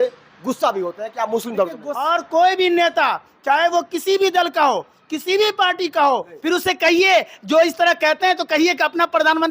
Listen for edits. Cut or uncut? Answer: cut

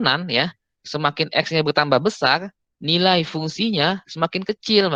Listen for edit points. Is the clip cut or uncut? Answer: uncut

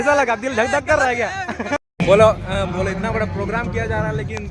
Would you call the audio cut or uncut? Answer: cut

